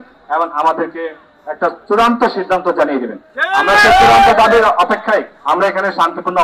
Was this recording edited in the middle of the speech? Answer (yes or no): no